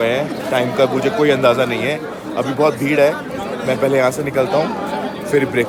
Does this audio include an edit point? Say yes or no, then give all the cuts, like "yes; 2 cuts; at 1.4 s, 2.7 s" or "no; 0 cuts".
no; 0 cuts